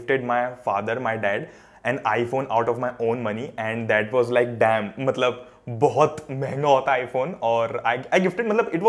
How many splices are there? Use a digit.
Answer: 0